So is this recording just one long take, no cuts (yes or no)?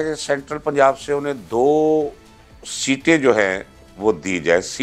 yes